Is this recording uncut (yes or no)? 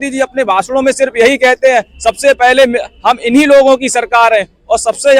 yes